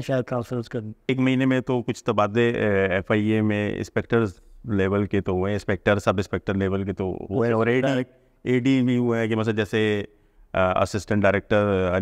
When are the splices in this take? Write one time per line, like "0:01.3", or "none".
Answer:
0:01.1